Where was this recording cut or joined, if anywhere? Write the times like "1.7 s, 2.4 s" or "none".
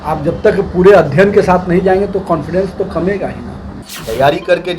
3.6 s